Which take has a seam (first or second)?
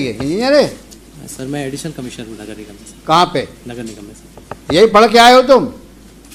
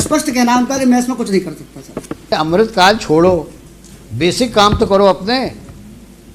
second